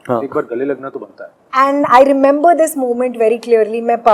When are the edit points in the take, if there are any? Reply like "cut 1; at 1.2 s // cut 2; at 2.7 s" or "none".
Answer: cut 1; at 1.4 s